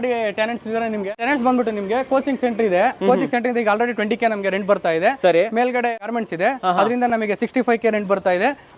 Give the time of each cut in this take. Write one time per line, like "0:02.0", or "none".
none